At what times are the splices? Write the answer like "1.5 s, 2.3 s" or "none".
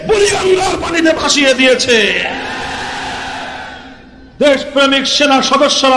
none